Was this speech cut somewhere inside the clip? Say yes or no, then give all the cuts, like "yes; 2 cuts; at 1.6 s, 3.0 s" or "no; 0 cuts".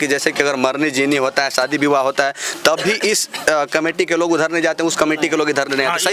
no; 0 cuts